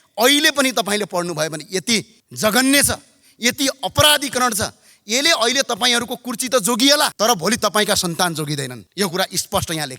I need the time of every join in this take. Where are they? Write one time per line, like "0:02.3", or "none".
0:02.2
0:07.1
0:08.8